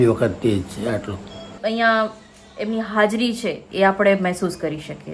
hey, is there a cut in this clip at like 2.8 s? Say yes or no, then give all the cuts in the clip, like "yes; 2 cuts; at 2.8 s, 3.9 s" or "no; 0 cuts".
no; 1 cut; at 1.5 s